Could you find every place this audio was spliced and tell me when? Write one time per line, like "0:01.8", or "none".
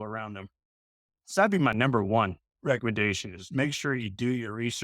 0:02.5